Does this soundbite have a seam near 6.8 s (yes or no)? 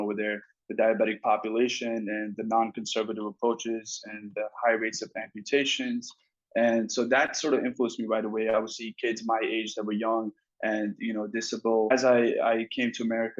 no